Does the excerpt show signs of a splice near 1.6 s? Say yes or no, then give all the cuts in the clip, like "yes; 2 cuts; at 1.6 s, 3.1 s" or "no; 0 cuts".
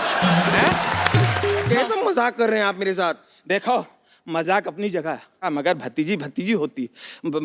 yes; 1 cut; at 1.6 s